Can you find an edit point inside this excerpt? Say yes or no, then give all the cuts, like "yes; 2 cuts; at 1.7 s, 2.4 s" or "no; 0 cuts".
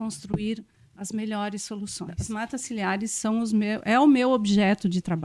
yes; 1 cut; at 2.2 s